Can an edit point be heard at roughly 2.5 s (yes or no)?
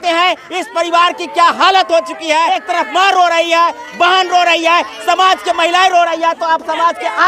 yes